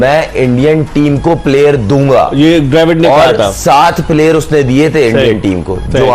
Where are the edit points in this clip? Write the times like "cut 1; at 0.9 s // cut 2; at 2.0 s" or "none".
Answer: none